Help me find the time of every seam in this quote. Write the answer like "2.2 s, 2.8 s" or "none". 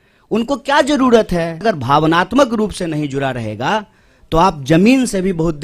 1.6 s